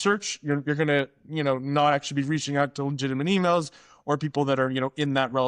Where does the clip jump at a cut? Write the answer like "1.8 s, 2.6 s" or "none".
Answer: none